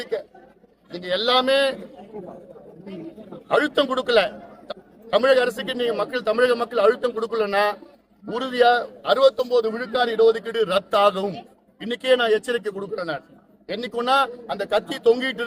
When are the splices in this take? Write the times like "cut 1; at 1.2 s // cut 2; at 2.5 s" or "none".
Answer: none

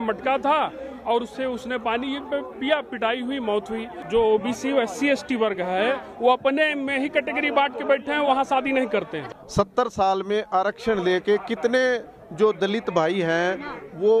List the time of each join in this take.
cut 1; at 3.9 s // cut 2; at 9.3 s

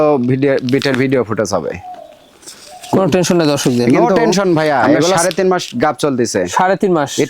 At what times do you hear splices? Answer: cut 1; at 5.2 s

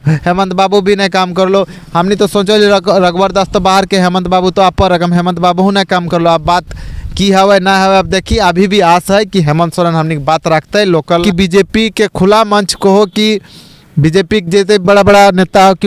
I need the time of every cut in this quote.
cut 1; at 11.1 s

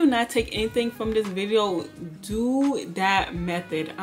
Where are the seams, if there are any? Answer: none

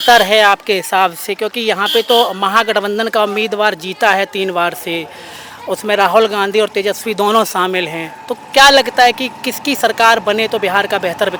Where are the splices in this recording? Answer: none

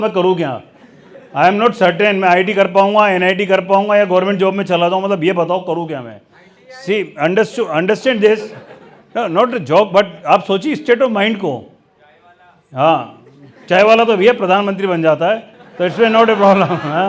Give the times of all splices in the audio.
none

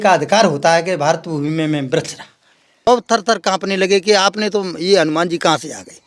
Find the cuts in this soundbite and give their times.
cut 1; at 2.9 s

